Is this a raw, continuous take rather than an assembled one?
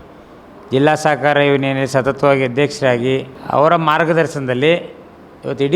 no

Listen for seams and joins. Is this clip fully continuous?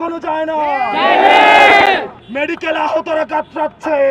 yes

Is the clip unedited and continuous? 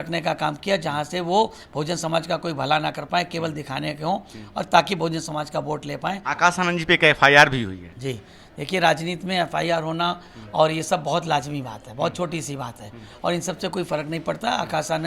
no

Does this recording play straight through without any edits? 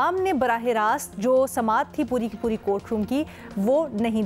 yes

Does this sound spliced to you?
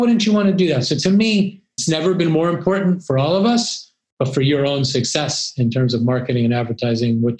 yes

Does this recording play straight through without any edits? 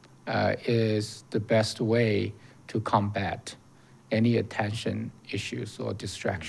yes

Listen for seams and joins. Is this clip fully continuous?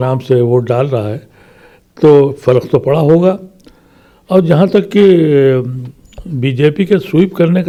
yes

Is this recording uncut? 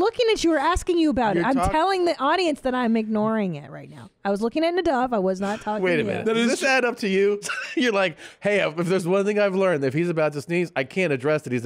no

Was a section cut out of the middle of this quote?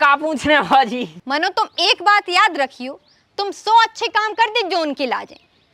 yes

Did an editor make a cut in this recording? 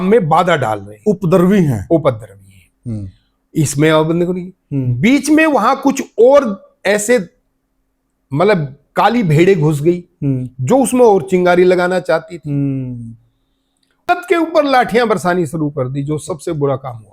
yes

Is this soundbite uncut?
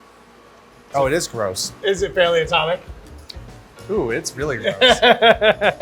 yes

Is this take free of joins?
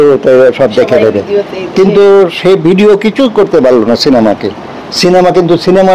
yes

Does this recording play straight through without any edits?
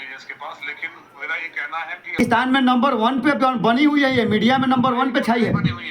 no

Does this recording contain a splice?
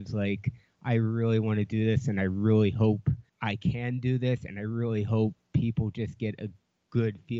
yes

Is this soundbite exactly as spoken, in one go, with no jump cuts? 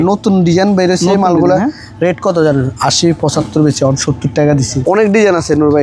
no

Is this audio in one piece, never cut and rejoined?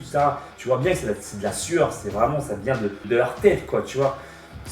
no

